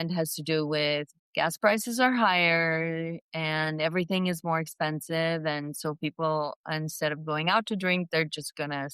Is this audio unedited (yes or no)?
no